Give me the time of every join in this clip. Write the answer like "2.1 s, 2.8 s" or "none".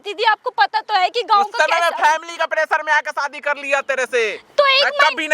none

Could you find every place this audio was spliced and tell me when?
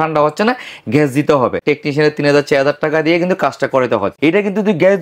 1.6 s, 4.1 s

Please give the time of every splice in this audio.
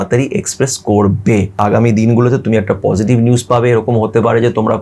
1.6 s

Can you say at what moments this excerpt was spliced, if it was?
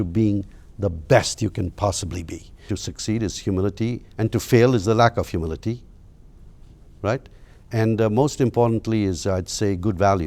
2.6 s

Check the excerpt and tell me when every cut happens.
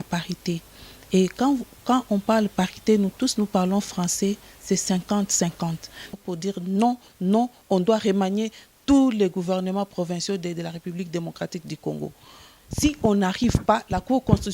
6.1 s

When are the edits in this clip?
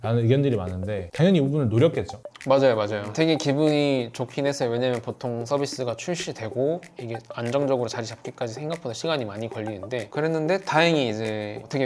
1.0 s, 3.0 s, 10.1 s

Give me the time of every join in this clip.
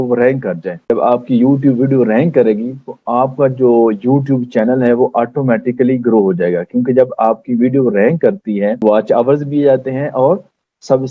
none

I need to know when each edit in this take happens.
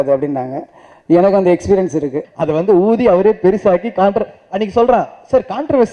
2.2 s

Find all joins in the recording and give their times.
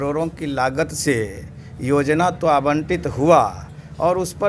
none

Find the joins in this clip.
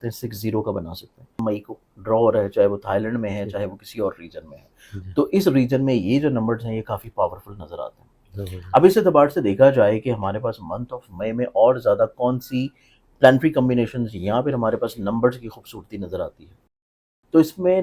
1.3 s

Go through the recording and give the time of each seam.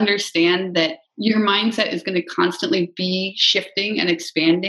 1.0 s, 1.7 s

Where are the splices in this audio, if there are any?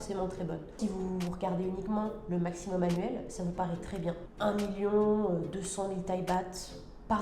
0.8 s, 4.3 s

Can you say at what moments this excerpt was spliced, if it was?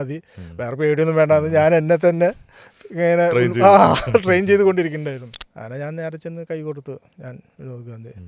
5.3 s

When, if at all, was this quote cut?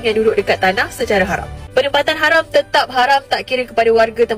1.5 s

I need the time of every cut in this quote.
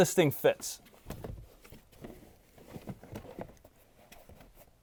none

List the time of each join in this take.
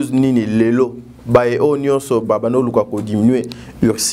none

